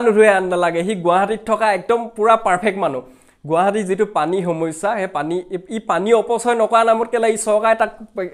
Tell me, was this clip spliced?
no; 0 cuts

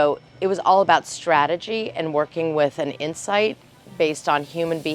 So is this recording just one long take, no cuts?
yes; 0 cuts

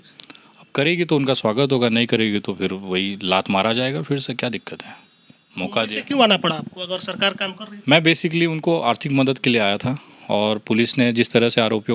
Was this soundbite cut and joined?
no; 0 cuts

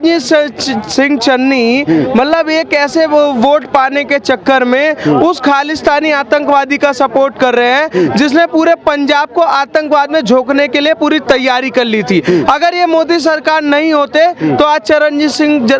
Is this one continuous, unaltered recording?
yes; 0 cuts

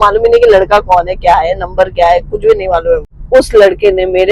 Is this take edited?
yes; 1 cut; at 3.1 s

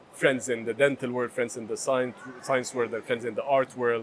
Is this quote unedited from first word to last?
yes; 0 cuts

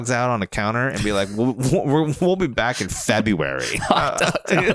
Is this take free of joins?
yes; 0 cuts

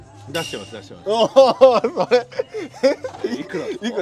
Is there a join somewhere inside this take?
no; 0 cuts

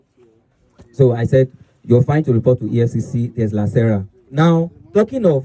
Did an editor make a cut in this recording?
no; 0 cuts

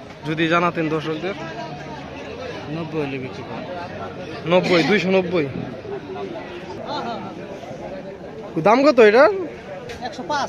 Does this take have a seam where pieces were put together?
yes; 1 cut; at 6.8 s

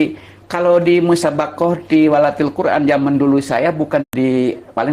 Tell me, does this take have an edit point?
yes; 1 cut; at 4.0 s

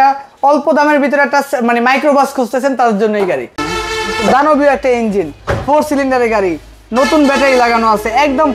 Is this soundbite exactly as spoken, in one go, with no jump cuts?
no; 1 cut; at 3.7 s

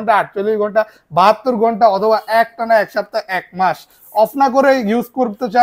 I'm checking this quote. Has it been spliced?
no; 0 cuts

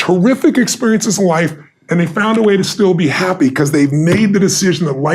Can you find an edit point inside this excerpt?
no; 0 cuts

